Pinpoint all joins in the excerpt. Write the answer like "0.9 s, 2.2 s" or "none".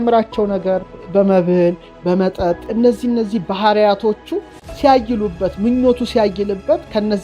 0.9 s, 2.7 s